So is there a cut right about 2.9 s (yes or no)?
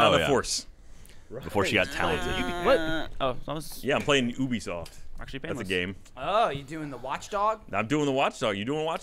yes